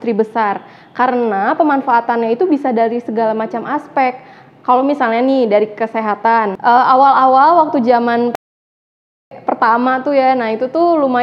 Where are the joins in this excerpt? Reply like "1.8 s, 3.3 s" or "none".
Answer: 6.5 s